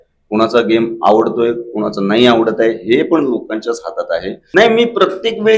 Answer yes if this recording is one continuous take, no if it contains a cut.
no